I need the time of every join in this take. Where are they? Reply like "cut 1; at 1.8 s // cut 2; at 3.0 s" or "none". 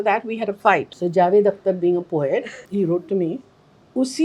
cut 1; at 0.9 s // cut 2; at 2.6 s

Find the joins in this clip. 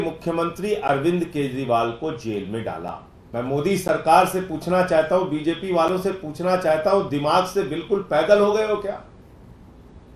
cut 1; at 3.1 s

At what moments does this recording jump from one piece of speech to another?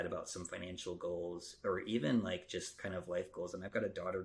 none

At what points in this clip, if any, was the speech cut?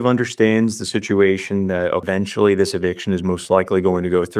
cut 1; at 2.0 s

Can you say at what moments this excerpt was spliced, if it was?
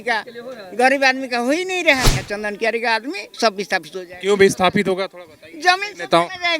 cut 1; at 2.2 s

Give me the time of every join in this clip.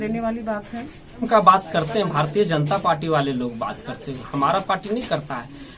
cut 1; at 1.2 s

